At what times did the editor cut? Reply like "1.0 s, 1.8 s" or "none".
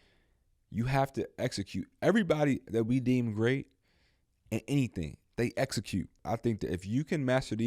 5.2 s, 6.2 s